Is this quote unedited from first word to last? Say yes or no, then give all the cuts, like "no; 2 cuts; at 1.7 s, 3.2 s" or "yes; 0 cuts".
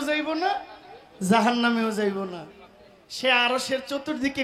yes; 0 cuts